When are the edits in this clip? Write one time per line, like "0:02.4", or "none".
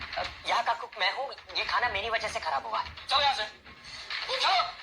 0:03.0